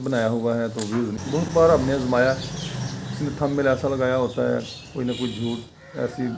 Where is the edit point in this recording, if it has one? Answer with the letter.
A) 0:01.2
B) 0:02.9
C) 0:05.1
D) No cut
A